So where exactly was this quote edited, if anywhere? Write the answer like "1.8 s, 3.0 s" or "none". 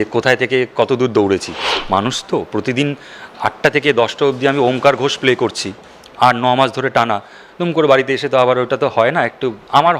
1.7 s